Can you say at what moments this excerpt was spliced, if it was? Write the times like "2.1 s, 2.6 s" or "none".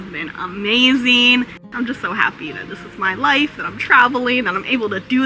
1.6 s